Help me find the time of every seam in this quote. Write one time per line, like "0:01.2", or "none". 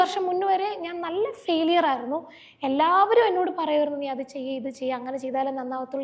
none